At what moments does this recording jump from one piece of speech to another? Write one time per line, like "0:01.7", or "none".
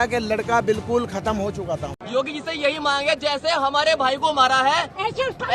0:01.9